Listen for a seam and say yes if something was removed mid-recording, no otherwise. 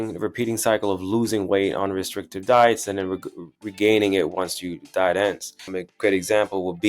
yes